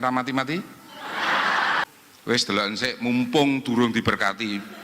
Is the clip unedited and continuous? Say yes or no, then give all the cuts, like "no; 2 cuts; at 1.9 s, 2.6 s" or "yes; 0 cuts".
no; 1 cut; at 1.8 s